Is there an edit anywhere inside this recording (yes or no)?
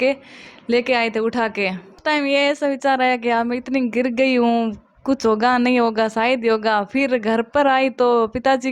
yes